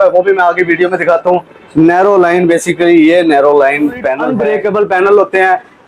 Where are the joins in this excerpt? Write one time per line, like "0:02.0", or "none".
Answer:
0:04.3